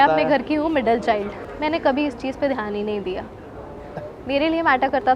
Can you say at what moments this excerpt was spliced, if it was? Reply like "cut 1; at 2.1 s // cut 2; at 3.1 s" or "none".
cut 1; at 1.4 s